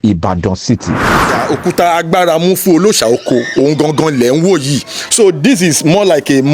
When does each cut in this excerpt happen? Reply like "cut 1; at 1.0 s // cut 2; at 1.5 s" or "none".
cut 1; at 1.3 s